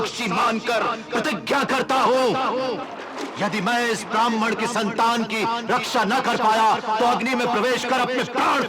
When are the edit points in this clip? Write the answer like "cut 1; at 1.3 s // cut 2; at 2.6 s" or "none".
cut 1; at 2.8 s